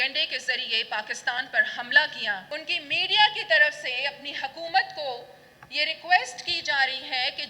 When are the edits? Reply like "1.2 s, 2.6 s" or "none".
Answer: 2.4 s